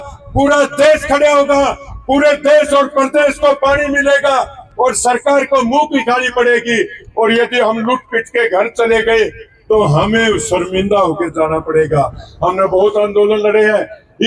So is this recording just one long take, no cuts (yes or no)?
yes